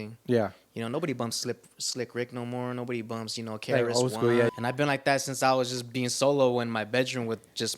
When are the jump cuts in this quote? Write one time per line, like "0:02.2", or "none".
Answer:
0:04.5